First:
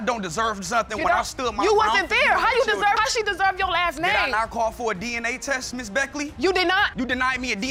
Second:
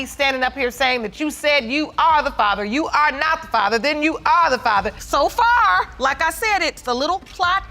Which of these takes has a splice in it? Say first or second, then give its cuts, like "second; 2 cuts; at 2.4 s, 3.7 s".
second; 1 cut; at 4.9 s